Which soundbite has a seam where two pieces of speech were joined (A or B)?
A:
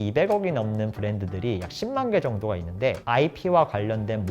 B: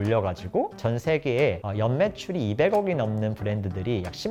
A